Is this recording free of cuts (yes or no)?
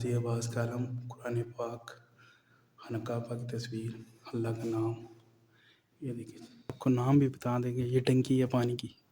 no